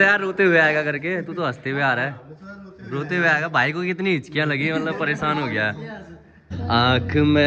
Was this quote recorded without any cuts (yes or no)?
no